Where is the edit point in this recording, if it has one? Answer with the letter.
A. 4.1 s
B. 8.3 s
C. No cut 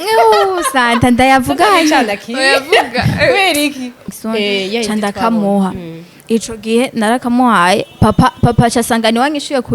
A